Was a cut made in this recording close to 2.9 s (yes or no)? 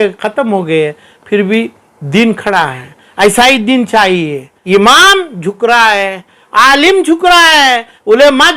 no